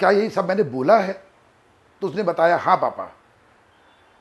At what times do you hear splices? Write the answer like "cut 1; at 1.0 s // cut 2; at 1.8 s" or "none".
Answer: none